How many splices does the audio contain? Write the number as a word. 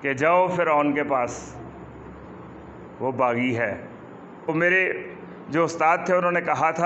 one